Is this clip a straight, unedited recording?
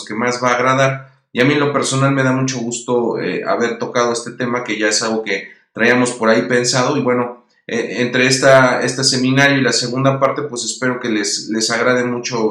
no; 1 cut; at 3.6 s

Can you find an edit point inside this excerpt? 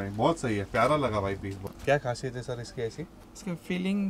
yes; 1 cut; at 1.6 s

